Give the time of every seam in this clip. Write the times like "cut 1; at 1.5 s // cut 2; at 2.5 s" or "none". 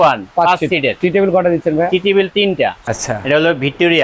cut 1; at 0.9 s // cut 2; at 2.8 s

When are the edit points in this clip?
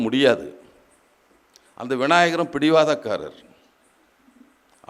none

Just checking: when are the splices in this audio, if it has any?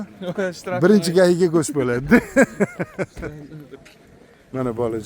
cut 1; at 3.7 s

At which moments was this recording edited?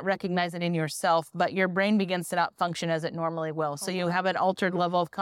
none

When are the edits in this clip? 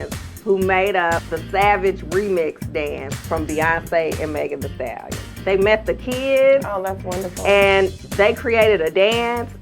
cut 1; at 1.3 s // cut 2; at 5.3 s // cut 3; at 8.0 s

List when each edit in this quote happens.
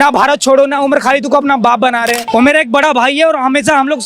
cut 1; at 2.2 s

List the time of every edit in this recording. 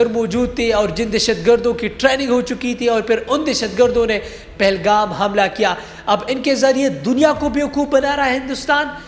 none

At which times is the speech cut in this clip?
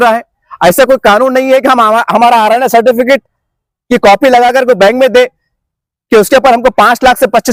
none

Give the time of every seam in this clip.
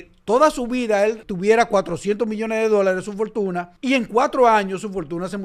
cut 1; at 1.3 s // cut 2; at 3.7 s

